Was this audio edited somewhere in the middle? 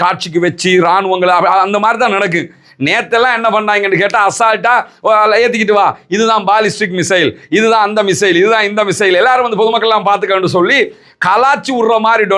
no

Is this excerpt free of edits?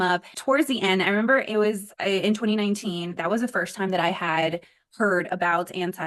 yes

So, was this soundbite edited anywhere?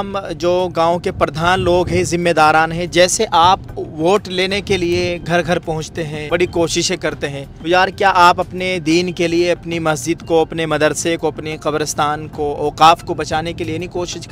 yes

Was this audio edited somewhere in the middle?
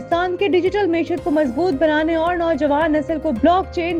no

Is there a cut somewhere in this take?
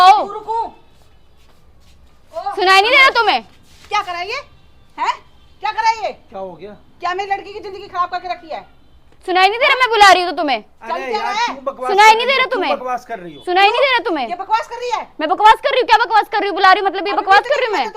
no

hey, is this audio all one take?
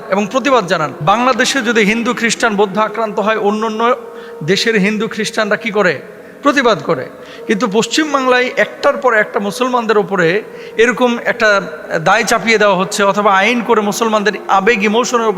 no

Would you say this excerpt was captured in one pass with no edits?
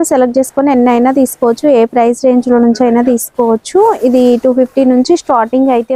yes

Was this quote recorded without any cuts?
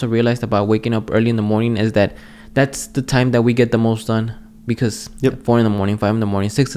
yes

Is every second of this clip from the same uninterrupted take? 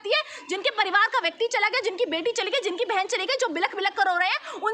yes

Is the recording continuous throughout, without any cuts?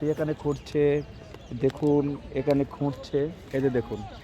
yes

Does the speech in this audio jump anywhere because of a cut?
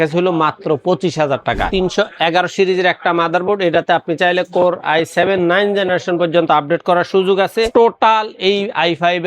yes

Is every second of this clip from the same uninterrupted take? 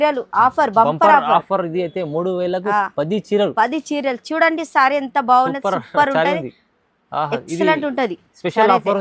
yes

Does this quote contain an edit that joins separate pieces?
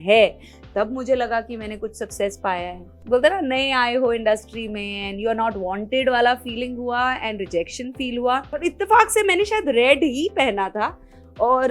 yes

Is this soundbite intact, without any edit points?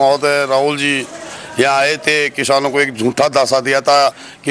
yes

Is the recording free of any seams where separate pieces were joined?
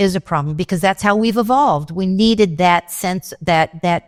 yes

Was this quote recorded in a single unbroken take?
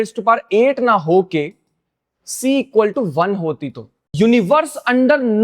no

